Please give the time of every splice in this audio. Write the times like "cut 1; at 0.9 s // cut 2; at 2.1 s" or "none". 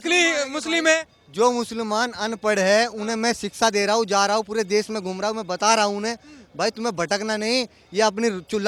none